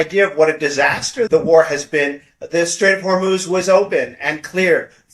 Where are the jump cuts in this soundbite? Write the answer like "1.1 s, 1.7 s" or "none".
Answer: 1.3 s